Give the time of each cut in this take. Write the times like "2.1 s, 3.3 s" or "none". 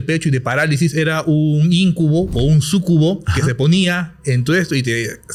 none